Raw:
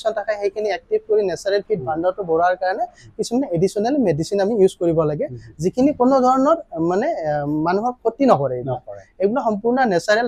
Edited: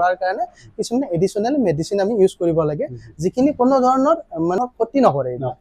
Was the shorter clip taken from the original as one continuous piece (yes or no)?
no